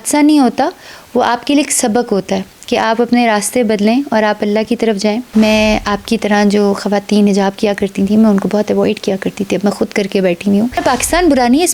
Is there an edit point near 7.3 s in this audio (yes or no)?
no